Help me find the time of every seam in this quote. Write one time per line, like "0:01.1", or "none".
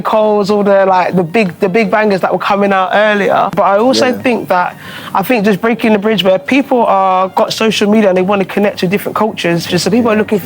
0:03.5
0:09.6